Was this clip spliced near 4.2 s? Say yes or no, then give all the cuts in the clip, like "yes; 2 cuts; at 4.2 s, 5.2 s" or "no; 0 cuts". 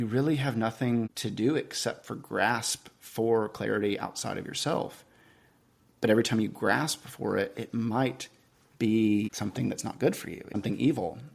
no; 3 cuts; at 1.2 s, 9.3 s, 10.5 s